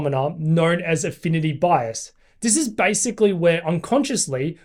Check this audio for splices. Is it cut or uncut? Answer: uncut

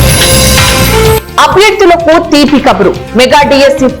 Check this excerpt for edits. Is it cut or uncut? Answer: cut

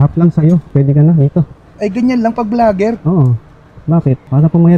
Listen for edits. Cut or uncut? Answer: uncut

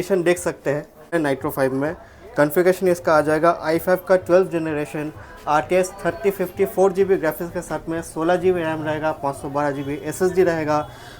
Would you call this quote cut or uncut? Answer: cut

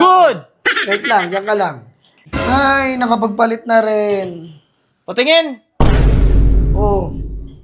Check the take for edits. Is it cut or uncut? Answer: cut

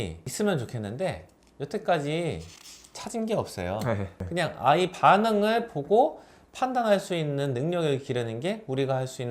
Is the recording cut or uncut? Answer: cut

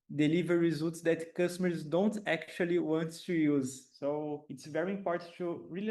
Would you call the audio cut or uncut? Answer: cut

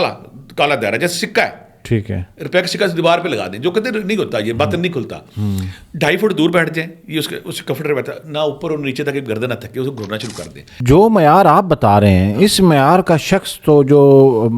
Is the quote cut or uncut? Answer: cut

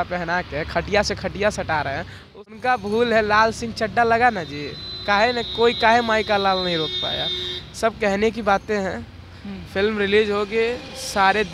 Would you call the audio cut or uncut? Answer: cut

